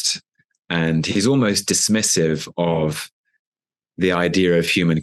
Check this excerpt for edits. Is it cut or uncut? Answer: uncut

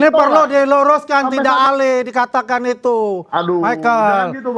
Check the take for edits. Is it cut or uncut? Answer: cut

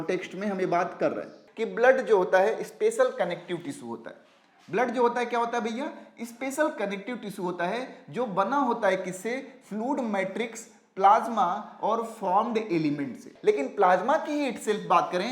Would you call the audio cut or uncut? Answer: cut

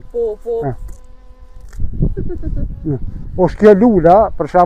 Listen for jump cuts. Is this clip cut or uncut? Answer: uncut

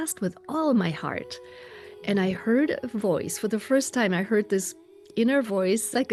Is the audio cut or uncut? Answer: uncut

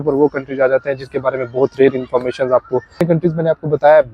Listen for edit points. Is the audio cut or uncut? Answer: cut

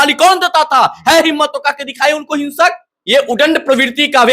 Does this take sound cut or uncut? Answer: cut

